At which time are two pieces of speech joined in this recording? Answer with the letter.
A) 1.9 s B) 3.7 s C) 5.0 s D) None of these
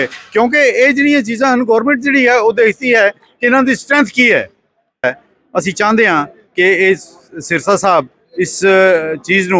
C